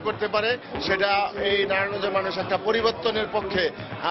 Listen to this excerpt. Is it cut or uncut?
uncut